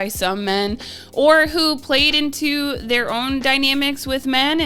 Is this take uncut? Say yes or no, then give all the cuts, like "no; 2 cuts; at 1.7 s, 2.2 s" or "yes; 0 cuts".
yes; 0 cuts